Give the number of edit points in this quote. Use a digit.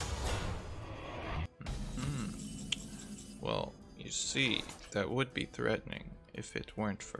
1